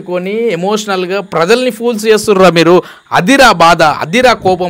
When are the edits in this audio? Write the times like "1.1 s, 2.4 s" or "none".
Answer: none